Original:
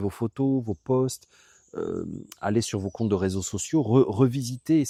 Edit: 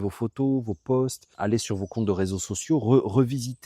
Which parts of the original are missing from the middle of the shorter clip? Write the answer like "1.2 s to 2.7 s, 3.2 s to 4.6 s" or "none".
1.2 s to 2.3 s